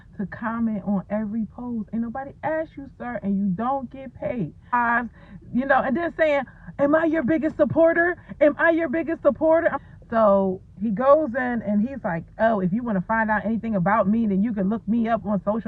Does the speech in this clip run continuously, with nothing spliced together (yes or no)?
no